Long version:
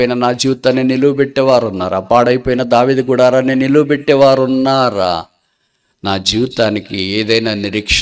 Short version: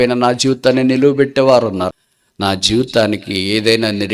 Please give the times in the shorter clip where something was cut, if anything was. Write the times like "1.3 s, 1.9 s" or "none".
1.9 s